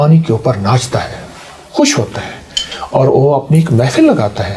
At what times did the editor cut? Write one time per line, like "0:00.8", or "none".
none